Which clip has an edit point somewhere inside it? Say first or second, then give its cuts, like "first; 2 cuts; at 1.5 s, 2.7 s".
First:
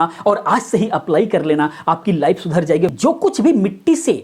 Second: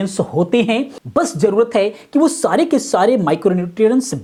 first; 1 cut; at 2.9 s